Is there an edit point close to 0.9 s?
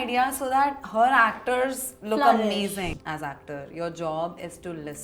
no; 1 cut; at 2.9 s

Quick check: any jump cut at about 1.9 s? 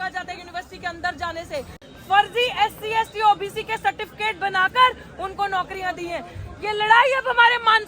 yes; 1 cut; at 1.9 s

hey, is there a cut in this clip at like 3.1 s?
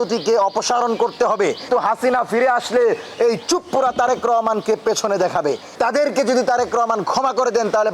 no; 2 cuts; at 1.7 s, 5.7 s

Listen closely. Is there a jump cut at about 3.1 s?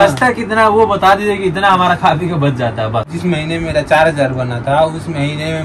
yes; 1 cut; at 3.1 s

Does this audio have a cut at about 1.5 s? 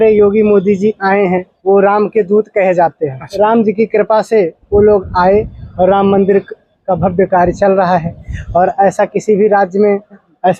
yes; 2 cuts; at 1.5 s, 3.2 s

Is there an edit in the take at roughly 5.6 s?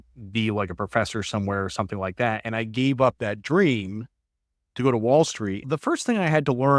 yes; 1 cut; at 5.6 s

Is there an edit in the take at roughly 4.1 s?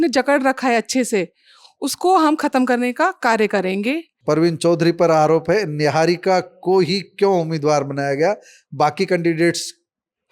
yes; 1 cut; at 4.1 s

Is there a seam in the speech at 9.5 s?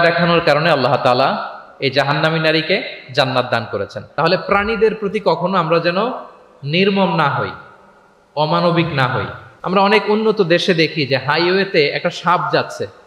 yes; 2 cuts; at 4.0 s, 9.5 s

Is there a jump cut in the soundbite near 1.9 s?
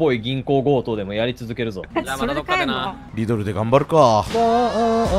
yes; 2 cuts; at 1.9 s, 3.0 s

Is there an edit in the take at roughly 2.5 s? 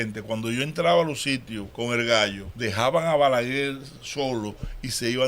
yes; 2 cuts; at 1.6 s, 2.5 s

